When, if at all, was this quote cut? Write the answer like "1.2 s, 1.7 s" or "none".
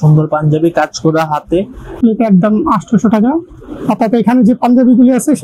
2.0 s